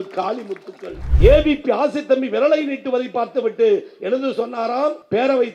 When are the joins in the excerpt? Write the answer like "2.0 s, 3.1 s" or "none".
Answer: 1.0 s